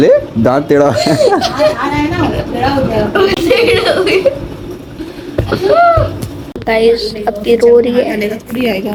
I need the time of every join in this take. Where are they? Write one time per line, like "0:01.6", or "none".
none

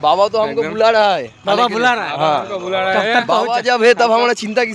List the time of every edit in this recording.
none

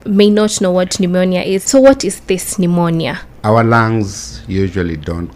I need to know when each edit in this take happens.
0:01.6
0:03.3

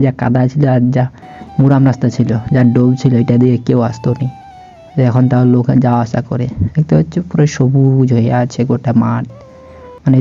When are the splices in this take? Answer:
none

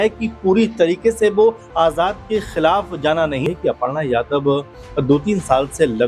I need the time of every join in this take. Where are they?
0:03.5

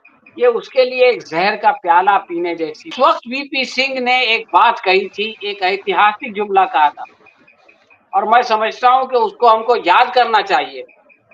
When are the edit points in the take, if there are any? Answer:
0:02.9

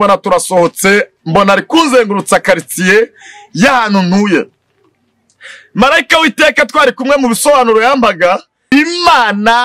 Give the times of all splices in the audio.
0:08.6

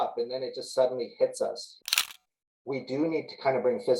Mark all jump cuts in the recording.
0:02.0

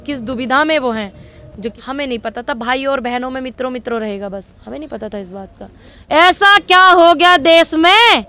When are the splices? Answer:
0:01.8
0:05.9

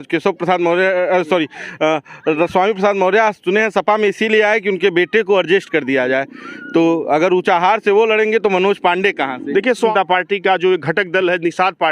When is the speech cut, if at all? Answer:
0:09.9

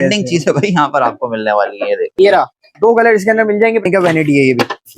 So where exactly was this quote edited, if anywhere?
0:02.1
0:03.8

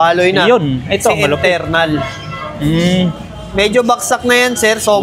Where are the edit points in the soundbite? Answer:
none

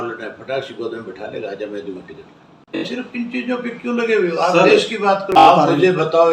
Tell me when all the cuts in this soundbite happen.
0:02.8
0:05.4

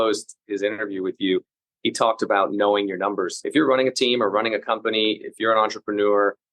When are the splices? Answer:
0:03.3

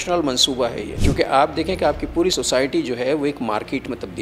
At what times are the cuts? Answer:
0:00.9

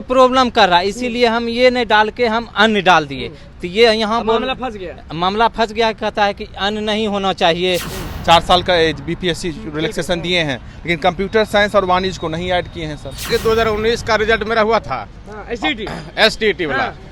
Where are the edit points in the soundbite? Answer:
0:07.9
0:13.3

